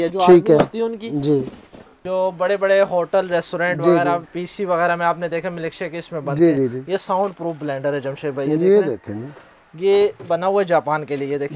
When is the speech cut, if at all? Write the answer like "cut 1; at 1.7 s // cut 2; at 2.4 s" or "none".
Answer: cut 1; at 2.0 s